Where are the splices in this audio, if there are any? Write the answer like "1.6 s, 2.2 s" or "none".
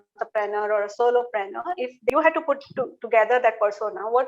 2.1 s